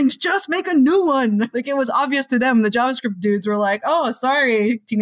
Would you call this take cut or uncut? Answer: cut